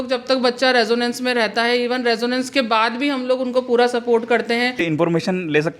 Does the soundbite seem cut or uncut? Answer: cut